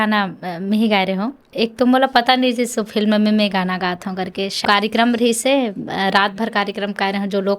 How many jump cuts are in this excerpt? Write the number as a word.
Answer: two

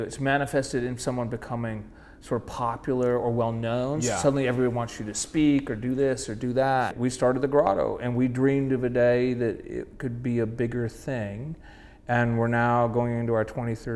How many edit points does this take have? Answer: one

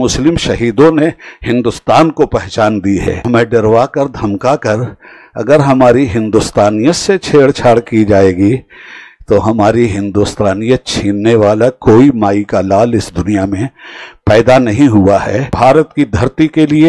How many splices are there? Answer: two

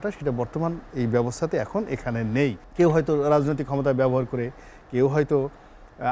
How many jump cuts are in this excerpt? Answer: one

